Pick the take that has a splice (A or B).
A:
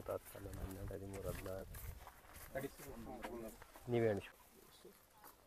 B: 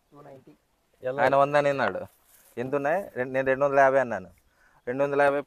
A